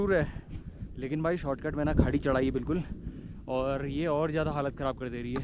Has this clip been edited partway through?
no; 0 cuts

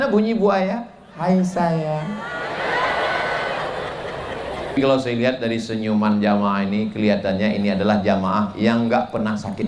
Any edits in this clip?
yes; 1 cut; at 4.8 s

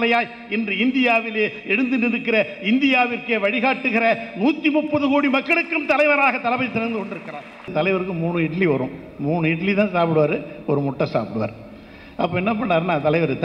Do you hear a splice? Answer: yes; 1 cut; at 7.7 s

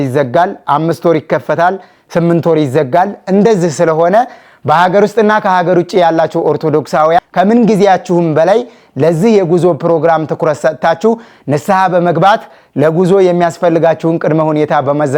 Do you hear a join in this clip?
no; 0 cuts

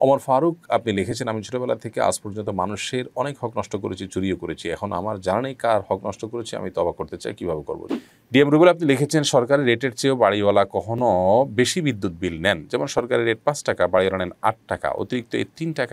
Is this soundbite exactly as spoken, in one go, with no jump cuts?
no; 1 cut; at 7.8 s

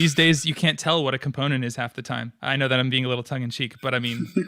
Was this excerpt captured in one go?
no; 1 cut; at 2.3 s

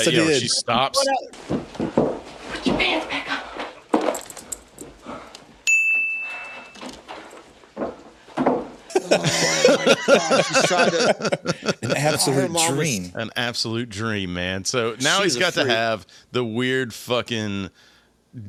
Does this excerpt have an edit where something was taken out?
no; 0 cuts

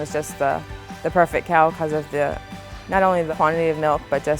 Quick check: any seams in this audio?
yes; 1 cut; at 3.3 s

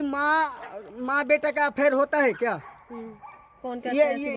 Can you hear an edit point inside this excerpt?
no; 0 cuts

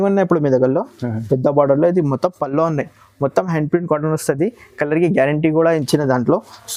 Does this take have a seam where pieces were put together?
no; 0 cuts

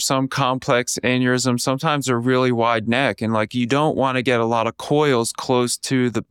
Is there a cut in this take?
no; 0 cuts

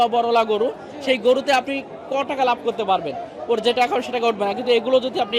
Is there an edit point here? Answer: no; 0 cuts

